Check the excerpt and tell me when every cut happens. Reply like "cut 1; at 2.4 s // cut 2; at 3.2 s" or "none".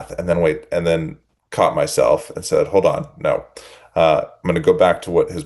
none